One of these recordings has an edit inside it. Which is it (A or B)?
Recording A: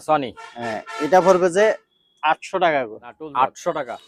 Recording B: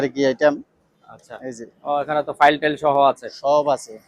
B